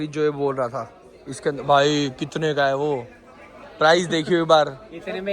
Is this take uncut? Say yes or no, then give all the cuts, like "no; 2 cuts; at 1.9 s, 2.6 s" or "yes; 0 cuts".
yes; 0 cuts